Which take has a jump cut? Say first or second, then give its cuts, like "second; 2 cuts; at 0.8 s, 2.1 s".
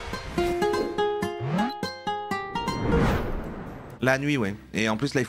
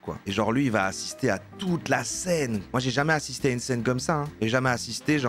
first; 1 cut; at 3.9 s